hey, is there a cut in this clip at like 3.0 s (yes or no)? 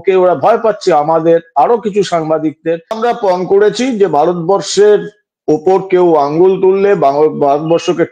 yes